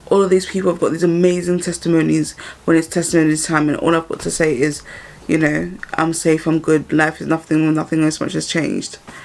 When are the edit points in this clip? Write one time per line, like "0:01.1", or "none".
none